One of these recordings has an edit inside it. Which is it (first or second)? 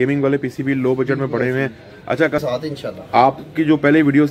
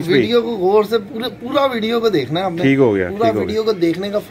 first